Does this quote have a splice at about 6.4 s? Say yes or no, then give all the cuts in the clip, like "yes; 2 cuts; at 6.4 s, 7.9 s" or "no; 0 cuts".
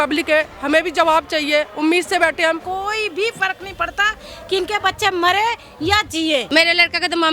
yes; 2 cuts; at 2.6 s, 6.4 s